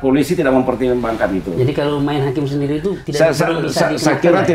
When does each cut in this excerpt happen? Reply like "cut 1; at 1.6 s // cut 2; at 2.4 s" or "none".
none